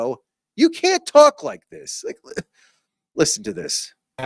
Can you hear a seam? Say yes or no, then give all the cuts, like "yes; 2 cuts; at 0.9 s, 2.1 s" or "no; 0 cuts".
no; 0 cuts